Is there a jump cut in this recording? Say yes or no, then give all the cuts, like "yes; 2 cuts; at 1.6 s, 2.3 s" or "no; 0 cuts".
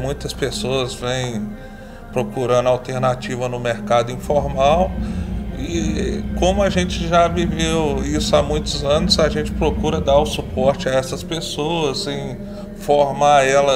no; 0 cuts